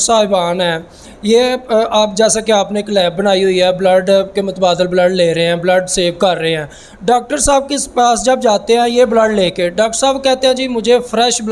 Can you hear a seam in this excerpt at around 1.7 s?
no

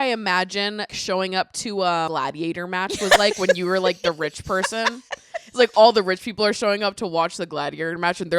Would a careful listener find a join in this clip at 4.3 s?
no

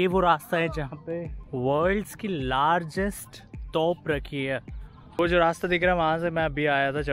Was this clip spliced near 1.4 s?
yes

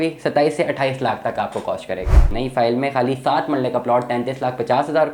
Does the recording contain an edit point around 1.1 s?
no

